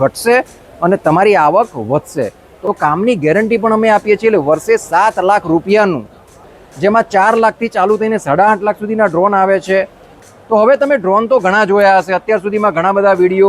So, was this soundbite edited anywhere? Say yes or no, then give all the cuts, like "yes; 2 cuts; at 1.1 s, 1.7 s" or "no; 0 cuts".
yes; 3 cuts; at 2.6 s, 6.5 s, 10.1 s